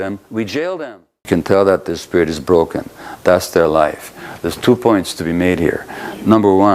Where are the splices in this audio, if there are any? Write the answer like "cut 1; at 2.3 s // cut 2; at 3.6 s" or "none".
cut 1; at 1.1 s